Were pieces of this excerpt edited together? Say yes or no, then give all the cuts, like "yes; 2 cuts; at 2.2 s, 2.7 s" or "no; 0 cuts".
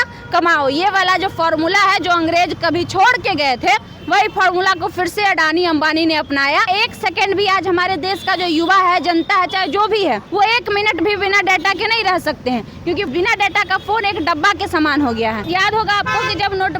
yes; 4 cuts; at 6.6 s, 10.2 s, 13.1 s, 15.4 s